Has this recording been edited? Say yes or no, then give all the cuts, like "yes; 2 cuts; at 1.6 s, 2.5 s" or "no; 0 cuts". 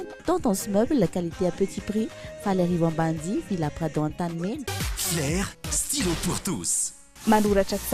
yes; 1 cut; at 4.7 s